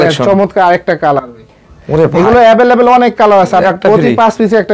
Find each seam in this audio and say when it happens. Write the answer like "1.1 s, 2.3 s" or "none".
3.6 s